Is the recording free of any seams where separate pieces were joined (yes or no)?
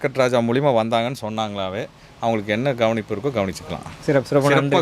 yes